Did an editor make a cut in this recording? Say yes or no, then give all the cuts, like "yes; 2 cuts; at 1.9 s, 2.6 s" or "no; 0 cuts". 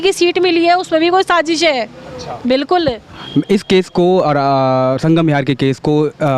no; 0 cuts